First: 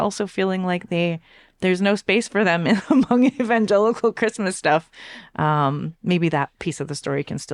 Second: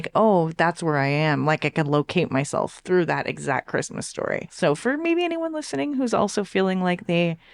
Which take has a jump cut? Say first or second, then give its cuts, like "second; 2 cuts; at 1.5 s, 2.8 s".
second; 1 cut; at 4.5 s